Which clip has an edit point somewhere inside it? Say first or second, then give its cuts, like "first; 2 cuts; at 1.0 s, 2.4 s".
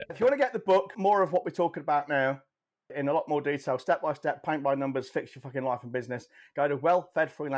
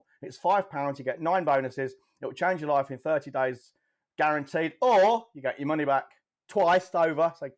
first; 2 cuts; at 0.9 s, 2.9 s